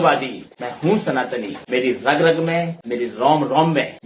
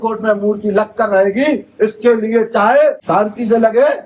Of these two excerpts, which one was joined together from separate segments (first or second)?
second